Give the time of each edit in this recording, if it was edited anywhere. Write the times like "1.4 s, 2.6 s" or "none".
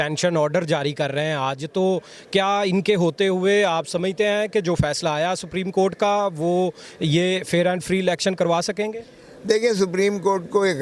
none